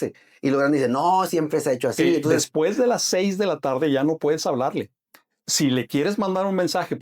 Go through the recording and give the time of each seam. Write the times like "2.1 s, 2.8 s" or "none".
2.4 s